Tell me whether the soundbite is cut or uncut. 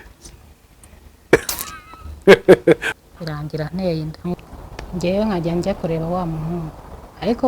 cut